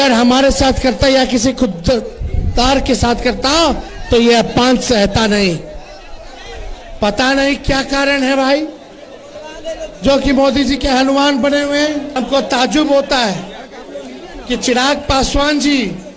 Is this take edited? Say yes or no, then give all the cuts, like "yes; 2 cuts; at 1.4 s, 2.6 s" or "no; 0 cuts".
yes; 1 cut; at 12.2 s